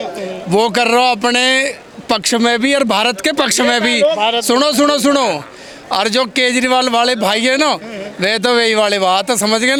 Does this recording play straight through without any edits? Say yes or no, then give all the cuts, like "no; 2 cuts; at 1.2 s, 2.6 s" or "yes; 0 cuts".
yes; 0 cuts